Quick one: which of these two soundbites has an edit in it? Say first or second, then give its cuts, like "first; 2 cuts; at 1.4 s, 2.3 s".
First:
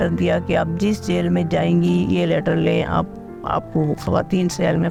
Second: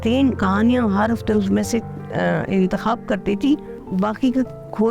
second; 1 cut; at 3.8 s